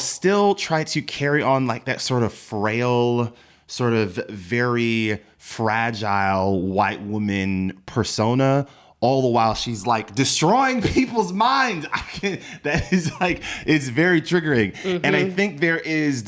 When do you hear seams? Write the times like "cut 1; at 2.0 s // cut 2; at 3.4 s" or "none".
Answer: none

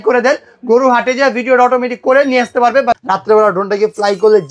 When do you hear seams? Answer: cut 1; at 3.0 s

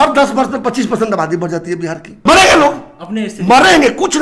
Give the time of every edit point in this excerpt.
cut 1; at 2.1 s

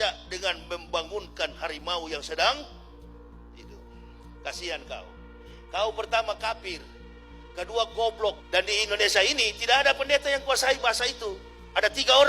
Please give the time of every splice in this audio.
cut 1; at 8.4 s

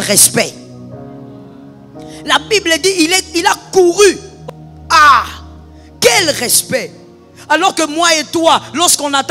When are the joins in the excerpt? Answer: cut 1; at 4.3 s

